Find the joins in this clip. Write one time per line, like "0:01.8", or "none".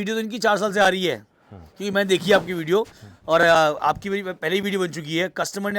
none